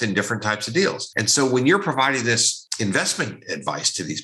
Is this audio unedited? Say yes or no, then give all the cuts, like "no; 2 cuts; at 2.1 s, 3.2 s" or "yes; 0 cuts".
no; 2 cuts; at 1.1 s, 2.6 s